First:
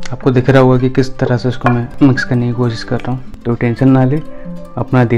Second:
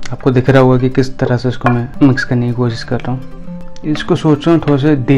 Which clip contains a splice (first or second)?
first